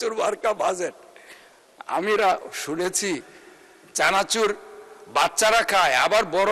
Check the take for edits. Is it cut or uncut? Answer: uncut